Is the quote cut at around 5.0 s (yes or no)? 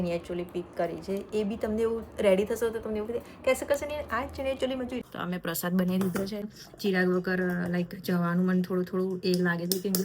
yes